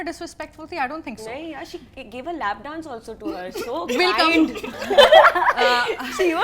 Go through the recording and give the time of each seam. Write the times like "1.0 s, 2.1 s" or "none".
none

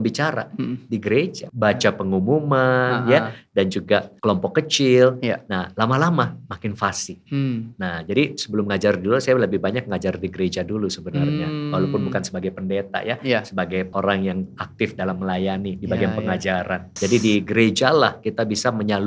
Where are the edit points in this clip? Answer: 1.4 s, 4.1 s, 13.9 s, 16.9 s

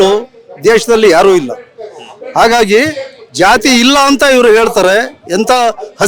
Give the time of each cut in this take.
none

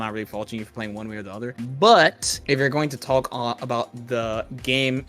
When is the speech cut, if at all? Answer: 1.5 s, 2.3 s

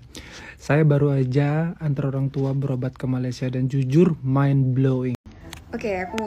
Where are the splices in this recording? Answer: 5.3 s

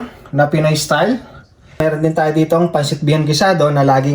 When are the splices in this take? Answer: 1.8 s

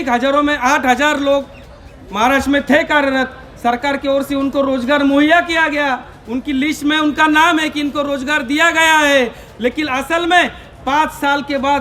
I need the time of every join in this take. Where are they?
none

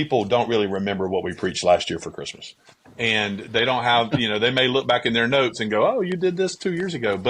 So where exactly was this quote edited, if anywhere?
none

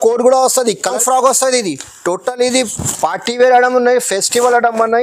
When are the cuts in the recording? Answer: 0.9 s

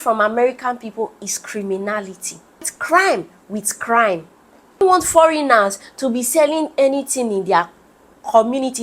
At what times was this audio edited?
2.7 s, 4.8 s

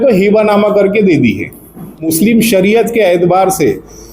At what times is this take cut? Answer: 2.1 s

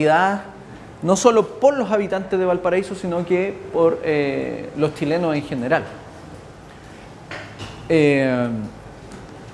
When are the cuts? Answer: none

